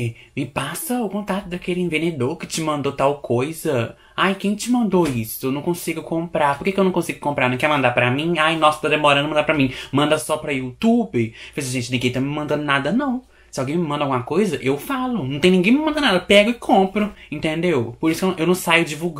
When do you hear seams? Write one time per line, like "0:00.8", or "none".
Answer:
none